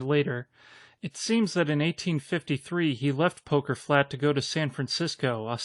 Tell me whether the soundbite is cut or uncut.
uncut